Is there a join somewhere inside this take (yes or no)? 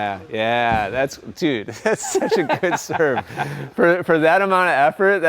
no